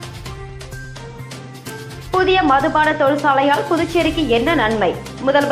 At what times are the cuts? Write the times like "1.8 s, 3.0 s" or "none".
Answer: 1.8 s